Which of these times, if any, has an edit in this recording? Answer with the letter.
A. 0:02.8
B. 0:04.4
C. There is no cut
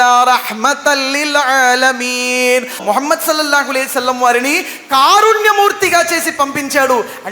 A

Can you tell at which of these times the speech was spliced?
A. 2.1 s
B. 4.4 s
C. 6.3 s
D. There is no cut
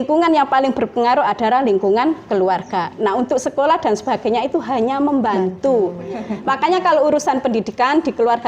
C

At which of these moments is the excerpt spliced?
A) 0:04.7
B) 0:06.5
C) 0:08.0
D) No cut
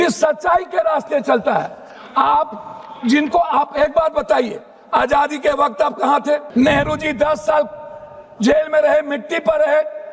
B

